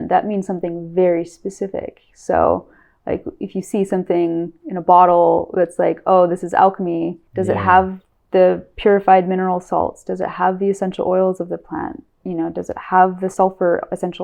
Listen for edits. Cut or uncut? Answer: cut